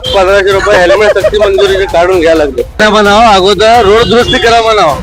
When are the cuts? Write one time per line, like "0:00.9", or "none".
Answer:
0:02.8

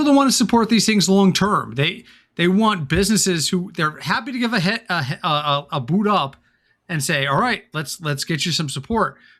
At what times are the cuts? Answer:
none

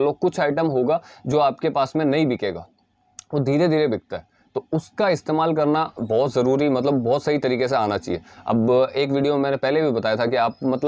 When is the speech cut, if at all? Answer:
none

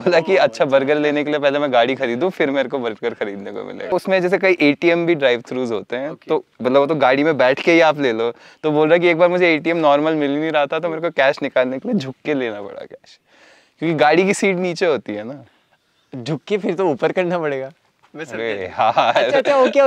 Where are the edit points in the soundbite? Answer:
none

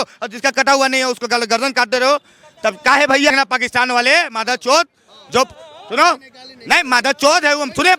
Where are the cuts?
0:03.4

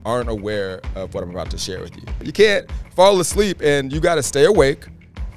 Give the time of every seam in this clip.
0:02.2

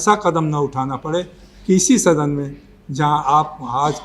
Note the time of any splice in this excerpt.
none

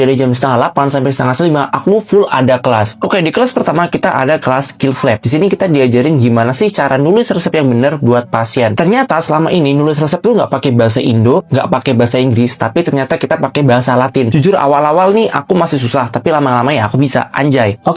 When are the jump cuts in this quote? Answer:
none

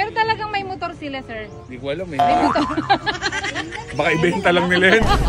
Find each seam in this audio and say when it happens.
none

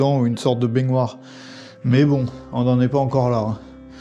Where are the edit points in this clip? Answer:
none

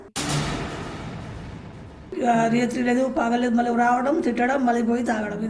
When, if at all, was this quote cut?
0:02.1

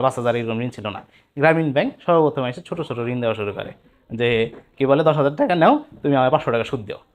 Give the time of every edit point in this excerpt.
none

